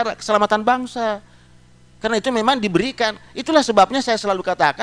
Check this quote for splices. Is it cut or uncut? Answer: uncut